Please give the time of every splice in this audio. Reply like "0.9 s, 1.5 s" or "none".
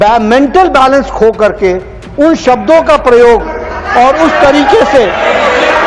none